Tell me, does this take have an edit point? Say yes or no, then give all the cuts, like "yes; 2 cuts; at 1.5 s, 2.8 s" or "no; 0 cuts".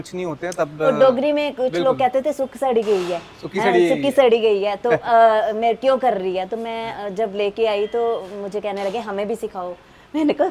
no; 0 cuts